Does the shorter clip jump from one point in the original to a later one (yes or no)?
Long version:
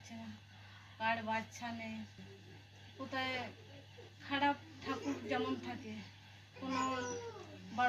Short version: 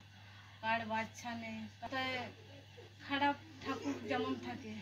yes